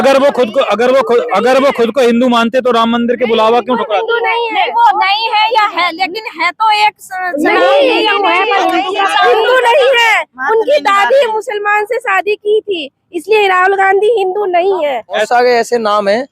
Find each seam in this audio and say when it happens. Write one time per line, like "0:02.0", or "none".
0:15.2